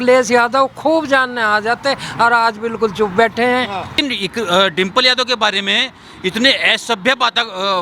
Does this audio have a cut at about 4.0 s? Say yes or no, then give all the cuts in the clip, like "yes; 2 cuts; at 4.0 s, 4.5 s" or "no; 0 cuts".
yes; 1 cut; at 4.0 s